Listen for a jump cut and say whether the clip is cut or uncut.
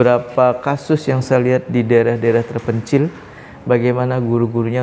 cut